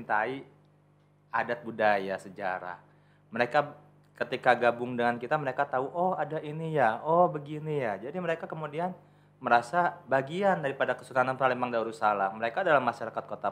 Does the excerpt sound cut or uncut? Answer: uncut